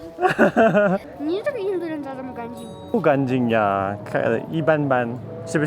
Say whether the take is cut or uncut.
cut